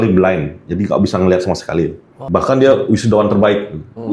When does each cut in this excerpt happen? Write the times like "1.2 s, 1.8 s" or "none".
2.1 s